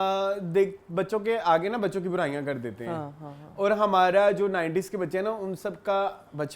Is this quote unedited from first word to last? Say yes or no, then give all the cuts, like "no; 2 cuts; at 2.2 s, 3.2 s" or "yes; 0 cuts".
yes; 0 cuts